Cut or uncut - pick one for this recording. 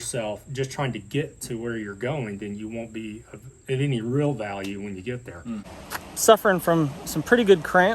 cut